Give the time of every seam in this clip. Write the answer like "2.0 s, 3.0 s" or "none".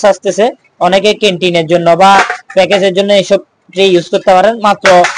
none